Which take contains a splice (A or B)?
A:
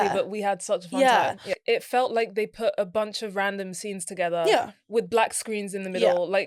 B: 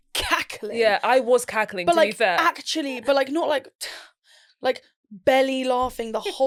A